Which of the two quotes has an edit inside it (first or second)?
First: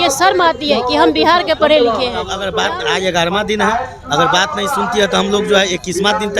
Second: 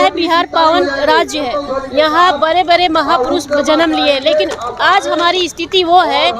first